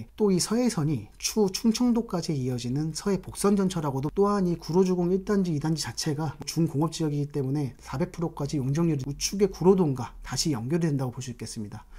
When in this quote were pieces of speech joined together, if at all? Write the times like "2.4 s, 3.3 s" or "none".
4.1 s, 6.5 s, 7.8 s, 9.0 s